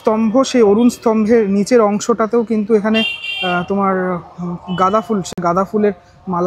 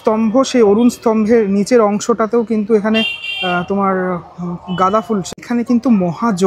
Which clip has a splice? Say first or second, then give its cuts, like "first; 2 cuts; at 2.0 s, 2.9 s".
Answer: second; 1 cut; at 5.3 s